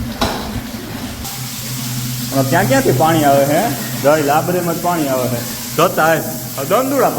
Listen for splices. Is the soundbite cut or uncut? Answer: cut